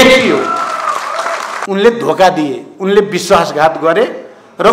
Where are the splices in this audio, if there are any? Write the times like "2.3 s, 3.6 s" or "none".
1.5 s